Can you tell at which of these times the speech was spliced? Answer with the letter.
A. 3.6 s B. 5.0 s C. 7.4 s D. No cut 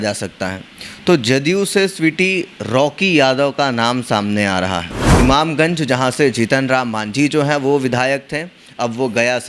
B